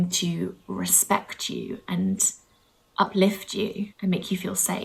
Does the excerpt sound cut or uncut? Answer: cut